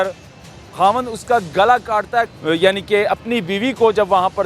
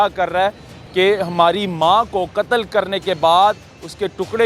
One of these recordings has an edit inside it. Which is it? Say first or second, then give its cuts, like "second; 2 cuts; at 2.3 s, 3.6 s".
first; 1 cut; at 2.3 s